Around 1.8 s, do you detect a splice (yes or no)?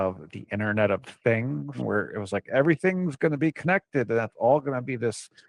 yes